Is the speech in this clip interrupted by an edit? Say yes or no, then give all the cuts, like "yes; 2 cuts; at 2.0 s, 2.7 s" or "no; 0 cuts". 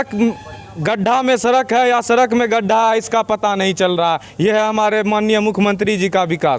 no; 0 cuts